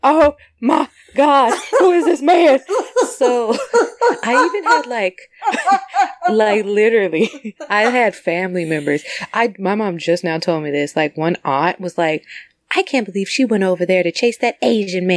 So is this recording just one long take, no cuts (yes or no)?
yes